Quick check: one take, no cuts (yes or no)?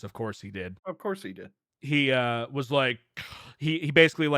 no